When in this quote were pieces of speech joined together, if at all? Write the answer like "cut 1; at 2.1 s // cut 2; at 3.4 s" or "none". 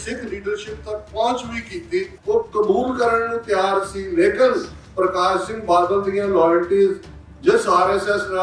cut 1; at 2.1 s